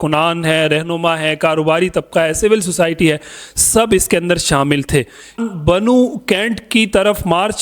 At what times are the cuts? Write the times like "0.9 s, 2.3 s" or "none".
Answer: 5.4 s